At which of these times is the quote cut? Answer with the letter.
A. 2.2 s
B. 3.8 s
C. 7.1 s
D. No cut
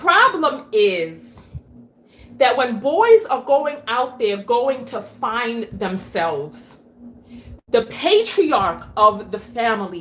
D